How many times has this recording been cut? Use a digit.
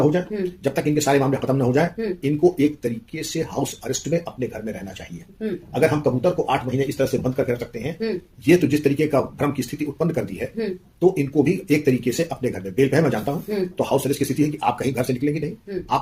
0